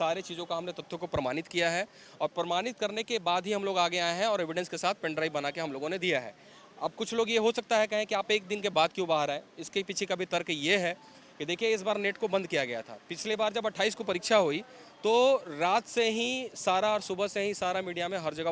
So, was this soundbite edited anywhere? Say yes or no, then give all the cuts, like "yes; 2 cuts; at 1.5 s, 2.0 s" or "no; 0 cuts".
no; 0 cuts